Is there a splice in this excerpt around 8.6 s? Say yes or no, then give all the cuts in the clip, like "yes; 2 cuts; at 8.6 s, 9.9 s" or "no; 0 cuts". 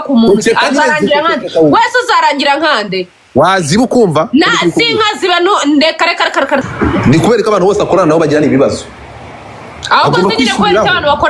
no; 1 cut; at 6.6 s